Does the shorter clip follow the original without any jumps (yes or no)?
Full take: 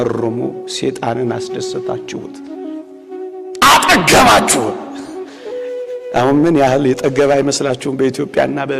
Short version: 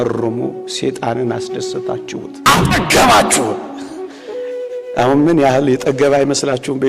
no